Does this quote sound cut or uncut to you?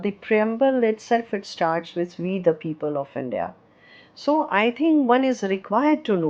uncut